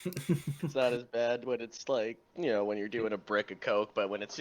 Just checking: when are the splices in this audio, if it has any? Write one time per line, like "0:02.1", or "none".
0:00.7
0:02.2